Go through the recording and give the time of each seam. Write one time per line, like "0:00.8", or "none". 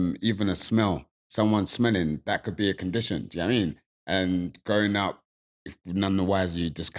none